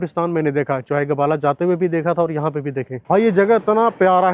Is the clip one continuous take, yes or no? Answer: no